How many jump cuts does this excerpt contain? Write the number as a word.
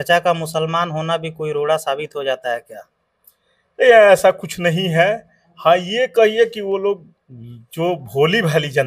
zero